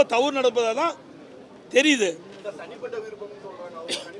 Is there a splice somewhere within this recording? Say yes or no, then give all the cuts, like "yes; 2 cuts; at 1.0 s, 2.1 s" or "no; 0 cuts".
no; 0 cuts